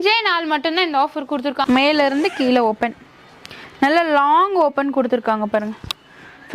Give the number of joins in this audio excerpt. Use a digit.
1